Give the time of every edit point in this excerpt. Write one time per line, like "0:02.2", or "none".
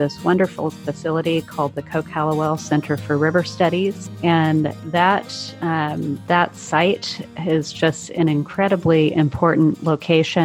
0:04.1